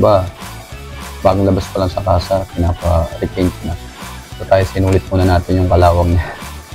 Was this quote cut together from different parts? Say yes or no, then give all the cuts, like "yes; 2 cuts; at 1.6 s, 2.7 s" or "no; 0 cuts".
no; 0 cuts